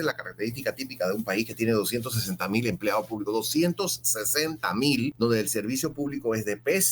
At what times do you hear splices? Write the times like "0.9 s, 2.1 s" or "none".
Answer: 5.1 s